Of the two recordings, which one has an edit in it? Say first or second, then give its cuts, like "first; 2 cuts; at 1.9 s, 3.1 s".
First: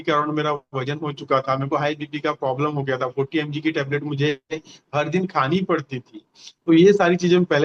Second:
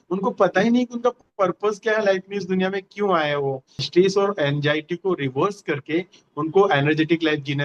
second; 1 cut; at 3.9 s